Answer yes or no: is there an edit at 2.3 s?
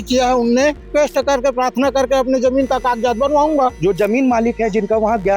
no